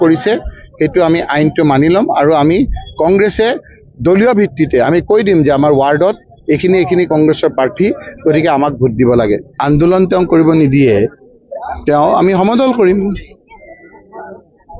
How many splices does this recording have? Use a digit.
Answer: 1